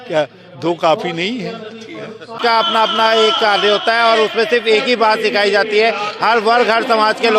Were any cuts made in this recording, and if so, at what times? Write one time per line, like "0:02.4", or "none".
0:02.4